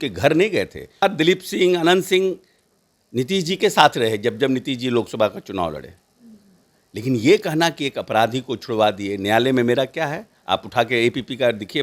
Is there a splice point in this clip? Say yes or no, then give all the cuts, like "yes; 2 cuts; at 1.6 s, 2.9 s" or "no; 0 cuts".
yes; 1 cut; at 1.0 s